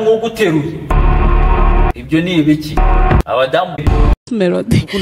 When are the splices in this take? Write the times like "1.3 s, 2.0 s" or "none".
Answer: 3.8 s